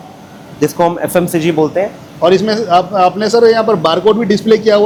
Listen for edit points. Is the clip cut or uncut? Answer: uncut